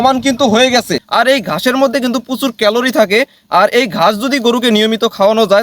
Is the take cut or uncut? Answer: cut